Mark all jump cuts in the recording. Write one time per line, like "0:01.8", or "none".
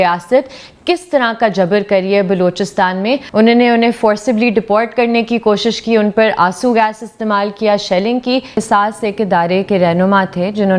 0:03.2
0:08.6